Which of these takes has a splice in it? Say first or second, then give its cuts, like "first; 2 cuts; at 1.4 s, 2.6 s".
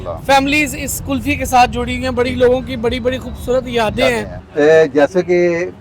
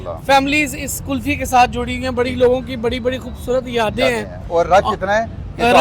first; 1 cut; at 4.4 s